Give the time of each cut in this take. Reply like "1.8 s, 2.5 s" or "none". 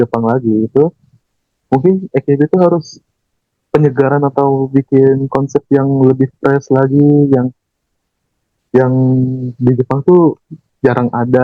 none